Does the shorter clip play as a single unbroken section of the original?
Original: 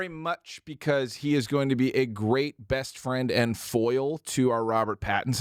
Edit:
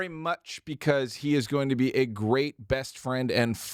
yes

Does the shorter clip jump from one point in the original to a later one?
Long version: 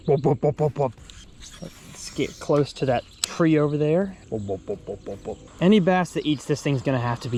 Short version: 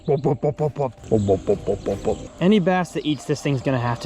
yes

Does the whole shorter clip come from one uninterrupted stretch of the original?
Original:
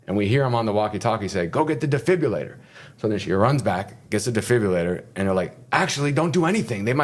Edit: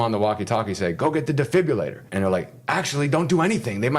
no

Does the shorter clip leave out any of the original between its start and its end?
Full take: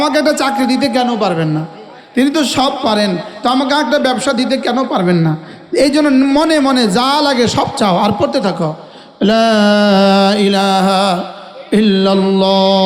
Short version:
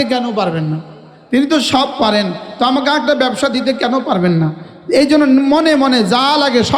no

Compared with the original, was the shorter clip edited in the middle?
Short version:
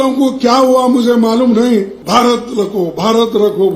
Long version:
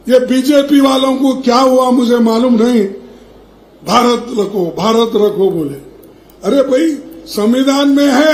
yes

